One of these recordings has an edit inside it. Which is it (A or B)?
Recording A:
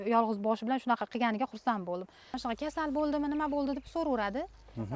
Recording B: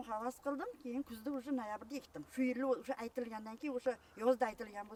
A